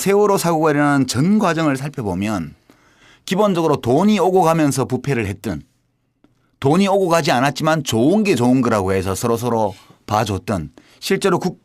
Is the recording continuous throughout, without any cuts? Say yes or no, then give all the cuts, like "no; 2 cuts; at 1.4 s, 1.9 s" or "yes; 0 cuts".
no; 1 cut; at 5.5 s